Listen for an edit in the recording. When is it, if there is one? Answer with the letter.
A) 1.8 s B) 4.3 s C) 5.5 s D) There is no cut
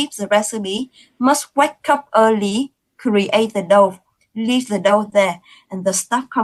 D